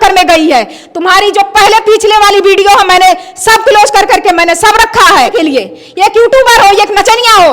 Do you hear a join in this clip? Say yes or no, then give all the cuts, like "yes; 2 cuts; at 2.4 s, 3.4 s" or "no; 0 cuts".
yes; 1 cut; at 5.3 s